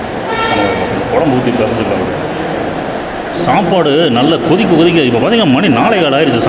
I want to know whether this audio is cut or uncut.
uncut